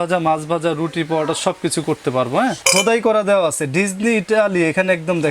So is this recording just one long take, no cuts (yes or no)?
no